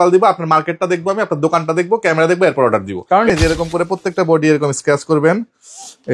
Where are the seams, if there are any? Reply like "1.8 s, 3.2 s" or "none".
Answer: 3.3 s